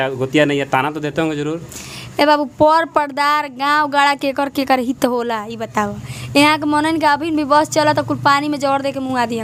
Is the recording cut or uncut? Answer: uncut